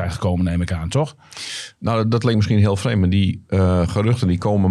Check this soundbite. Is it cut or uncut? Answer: uncut